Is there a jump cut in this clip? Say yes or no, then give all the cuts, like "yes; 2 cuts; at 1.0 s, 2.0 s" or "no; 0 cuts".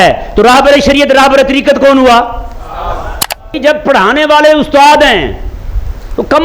yes; 1 cut; at 3.5 s